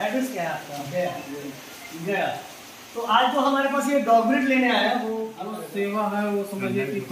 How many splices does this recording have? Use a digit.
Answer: 1